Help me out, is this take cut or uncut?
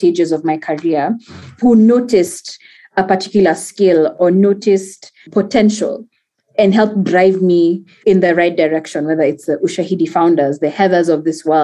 cut